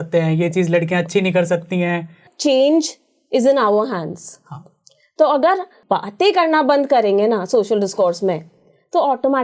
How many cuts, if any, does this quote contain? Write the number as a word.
two